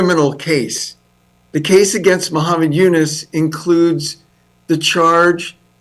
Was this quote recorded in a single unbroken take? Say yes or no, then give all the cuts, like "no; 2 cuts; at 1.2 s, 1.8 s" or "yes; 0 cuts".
yes; 0 cuts